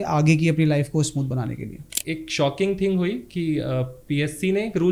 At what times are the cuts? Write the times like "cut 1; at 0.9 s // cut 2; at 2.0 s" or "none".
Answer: cut 1; at 1.9 s